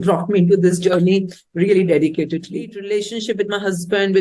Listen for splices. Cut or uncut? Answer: cut